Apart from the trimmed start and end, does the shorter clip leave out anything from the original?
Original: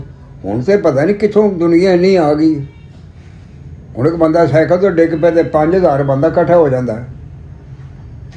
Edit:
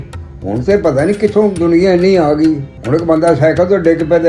yes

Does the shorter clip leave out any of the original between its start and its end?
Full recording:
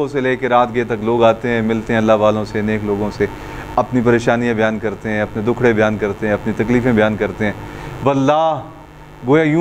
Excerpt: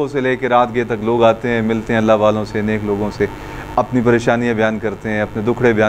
no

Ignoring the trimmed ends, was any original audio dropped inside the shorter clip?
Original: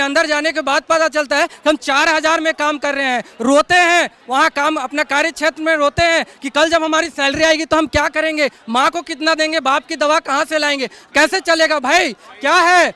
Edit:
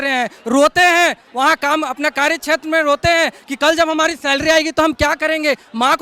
no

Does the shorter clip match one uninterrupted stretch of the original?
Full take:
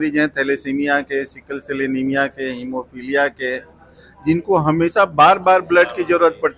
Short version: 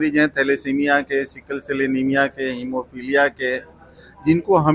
yes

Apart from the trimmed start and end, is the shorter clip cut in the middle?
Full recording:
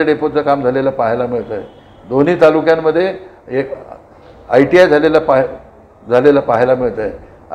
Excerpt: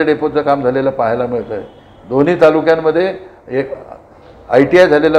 no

